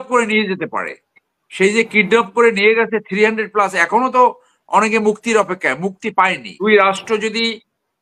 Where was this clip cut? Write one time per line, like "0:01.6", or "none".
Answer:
0:06.6

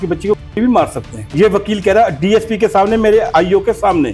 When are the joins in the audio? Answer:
0:01.3
0:03.3

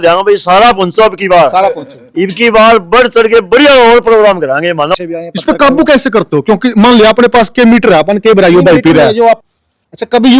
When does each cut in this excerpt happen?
0:04.9
0:09.5

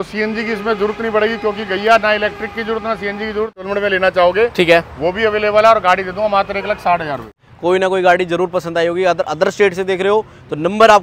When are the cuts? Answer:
0:03.6
0:07.4

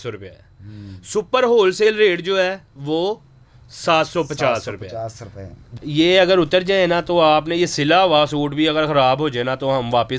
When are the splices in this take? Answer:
0:05.7

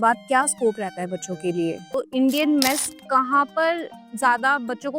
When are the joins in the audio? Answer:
0:01.9

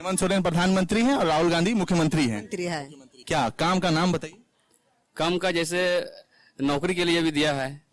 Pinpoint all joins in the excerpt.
0:03.2

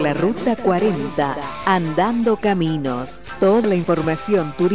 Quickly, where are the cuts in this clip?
0:03.7

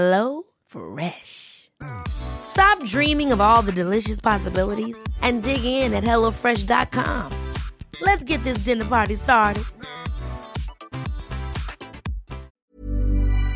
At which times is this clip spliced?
0:12.5

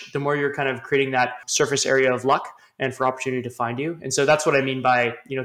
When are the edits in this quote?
0:01.4

